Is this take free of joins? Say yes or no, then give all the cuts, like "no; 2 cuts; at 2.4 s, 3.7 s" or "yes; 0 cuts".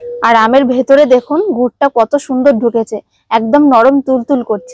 yes; 0 cuts